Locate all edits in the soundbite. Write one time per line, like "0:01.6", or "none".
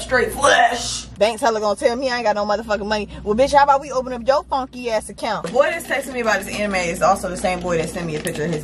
0:01.0
0:05.5